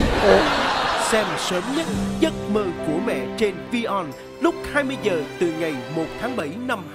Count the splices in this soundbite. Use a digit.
1